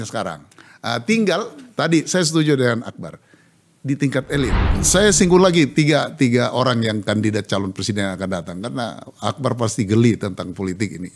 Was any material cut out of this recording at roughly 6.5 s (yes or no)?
no